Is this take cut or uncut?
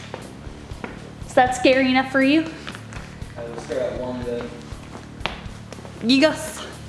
uncut